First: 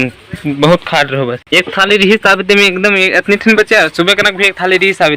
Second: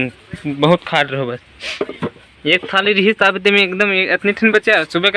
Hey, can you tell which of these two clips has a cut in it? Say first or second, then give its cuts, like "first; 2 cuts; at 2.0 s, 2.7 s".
first; 1 cut; at 1.4 s